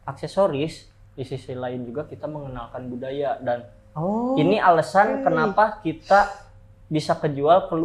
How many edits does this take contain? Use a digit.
0